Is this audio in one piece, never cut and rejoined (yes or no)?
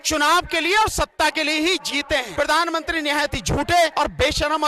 no